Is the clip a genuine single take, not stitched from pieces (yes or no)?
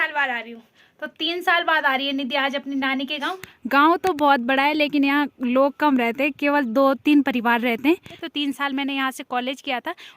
no